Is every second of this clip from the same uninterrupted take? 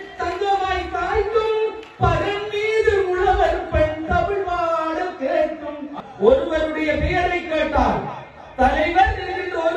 no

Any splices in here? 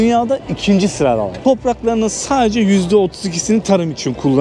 no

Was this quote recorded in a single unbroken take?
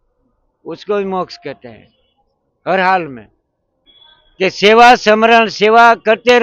no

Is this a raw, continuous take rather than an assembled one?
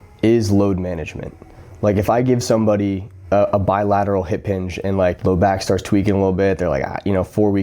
no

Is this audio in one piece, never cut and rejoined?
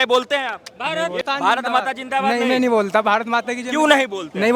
no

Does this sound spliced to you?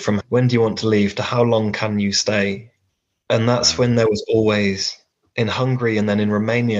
no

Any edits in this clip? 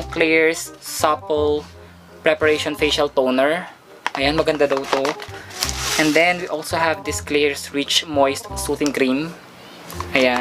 no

